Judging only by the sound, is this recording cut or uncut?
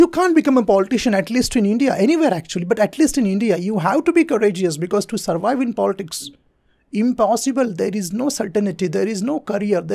uncut